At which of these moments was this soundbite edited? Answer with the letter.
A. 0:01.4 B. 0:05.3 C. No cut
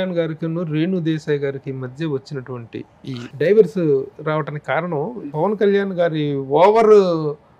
C